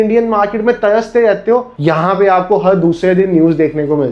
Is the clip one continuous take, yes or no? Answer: no